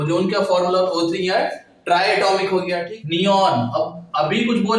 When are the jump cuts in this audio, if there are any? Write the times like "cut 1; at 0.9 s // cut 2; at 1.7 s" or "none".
cut 1; at 2.8 s